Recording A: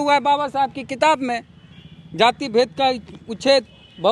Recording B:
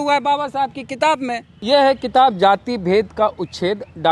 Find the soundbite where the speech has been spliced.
B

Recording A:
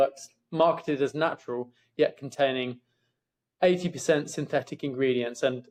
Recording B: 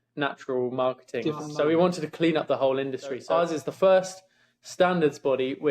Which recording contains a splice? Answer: B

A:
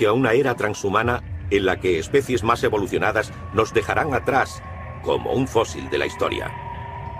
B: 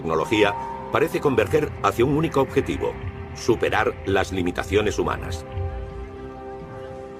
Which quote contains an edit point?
A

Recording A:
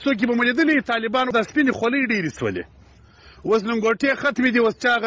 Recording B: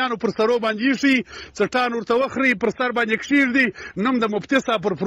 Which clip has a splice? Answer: A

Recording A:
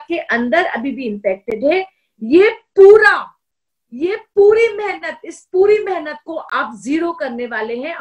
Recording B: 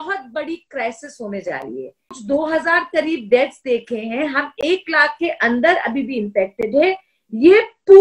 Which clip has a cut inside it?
B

